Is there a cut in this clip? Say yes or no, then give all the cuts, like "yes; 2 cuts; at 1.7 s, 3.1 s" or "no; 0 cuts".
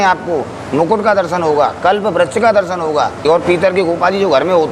yes; 1 cut; at 3.2 s